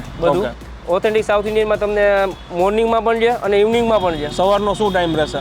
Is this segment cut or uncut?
uncut